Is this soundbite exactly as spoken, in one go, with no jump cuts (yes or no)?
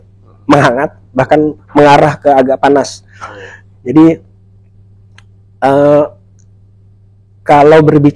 yes